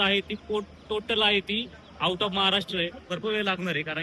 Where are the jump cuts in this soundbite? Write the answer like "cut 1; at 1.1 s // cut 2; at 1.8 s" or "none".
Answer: cut 1; at 3.1 s